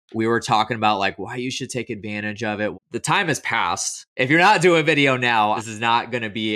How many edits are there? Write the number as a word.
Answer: three